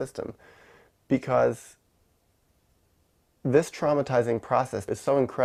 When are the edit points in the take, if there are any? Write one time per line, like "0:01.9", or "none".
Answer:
none